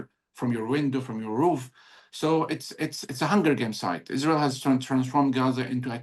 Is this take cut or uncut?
uncut